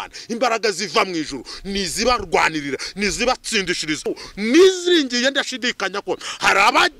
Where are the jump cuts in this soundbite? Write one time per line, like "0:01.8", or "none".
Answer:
0:04.0